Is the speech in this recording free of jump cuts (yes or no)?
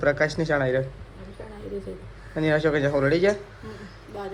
yes